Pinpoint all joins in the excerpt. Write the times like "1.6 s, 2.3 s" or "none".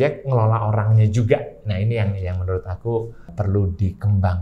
3.3 s